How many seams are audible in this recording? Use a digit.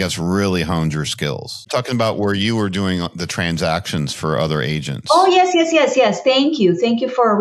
1